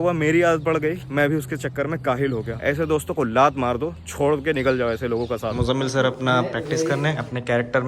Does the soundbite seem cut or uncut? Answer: cut